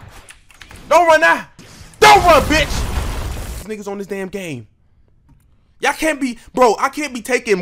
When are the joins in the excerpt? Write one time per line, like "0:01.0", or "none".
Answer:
0:03.6